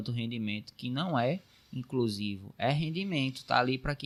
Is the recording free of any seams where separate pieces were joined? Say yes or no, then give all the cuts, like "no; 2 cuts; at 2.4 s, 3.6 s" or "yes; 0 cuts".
yes; 0 cuts